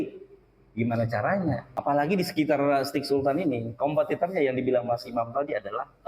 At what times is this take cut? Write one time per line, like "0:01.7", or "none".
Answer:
0:01.7